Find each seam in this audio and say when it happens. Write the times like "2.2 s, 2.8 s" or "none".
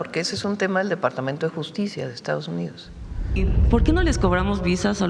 3.4 s